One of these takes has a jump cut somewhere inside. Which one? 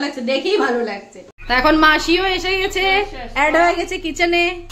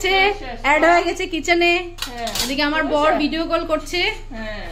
first; 1 cut; at 1.3 s

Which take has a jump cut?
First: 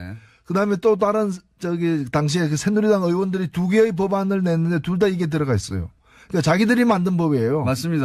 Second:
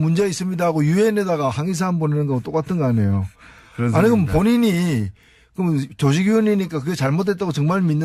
first; 1 cut; at 3.7 s

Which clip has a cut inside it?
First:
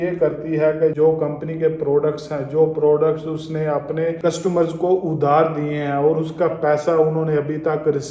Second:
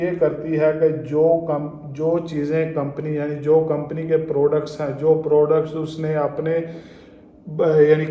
first; 2 cuts; at 0.9 s, 4.2 s

